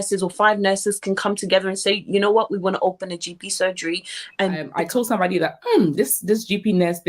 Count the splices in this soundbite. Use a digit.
1